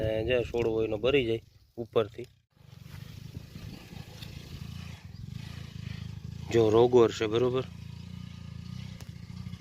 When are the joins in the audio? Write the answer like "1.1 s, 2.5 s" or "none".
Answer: 2.7 s